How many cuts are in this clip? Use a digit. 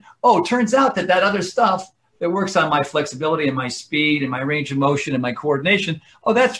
0